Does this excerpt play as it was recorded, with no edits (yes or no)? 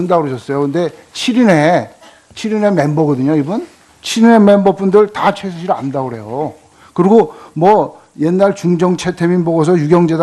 no